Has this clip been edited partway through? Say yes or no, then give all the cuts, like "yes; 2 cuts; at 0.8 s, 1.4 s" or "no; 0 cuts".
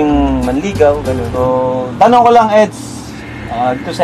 yes; 1 cut; at 1.7 s